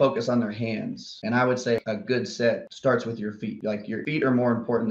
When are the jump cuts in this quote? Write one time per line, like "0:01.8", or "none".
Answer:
0:01.1
0:01.8
0:04.0

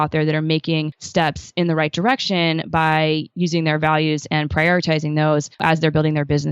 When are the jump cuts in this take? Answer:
0:01.0
0:05.6

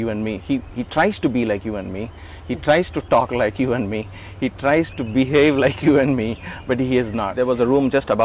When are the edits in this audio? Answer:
0:07.3

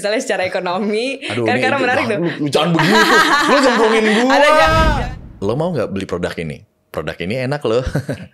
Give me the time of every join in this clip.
0:04.9

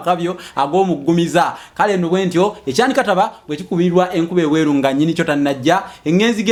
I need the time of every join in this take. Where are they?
none

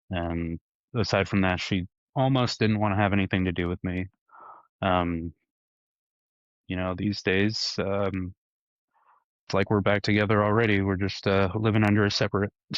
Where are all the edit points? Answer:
none

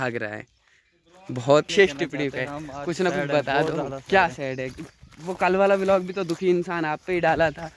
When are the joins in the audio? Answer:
0:01.7

